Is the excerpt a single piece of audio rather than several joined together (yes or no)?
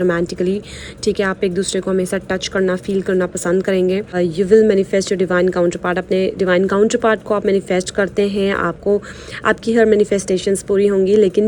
no